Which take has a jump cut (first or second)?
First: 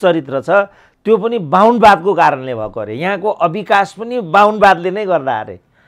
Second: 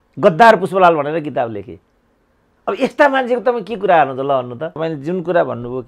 second